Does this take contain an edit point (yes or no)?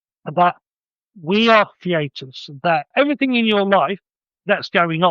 yes